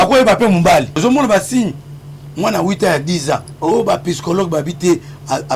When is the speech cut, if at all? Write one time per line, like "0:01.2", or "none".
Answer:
0:01.0
0:03.5